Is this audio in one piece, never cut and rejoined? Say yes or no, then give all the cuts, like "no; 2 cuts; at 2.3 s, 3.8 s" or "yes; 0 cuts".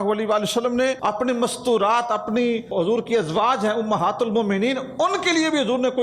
no; 2 cuts; at 1.0 s, 2.7 s